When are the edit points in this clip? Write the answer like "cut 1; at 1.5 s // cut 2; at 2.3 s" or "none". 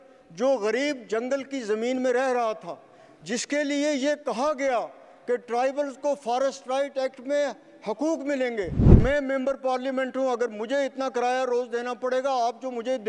cut 1; at 9.0 s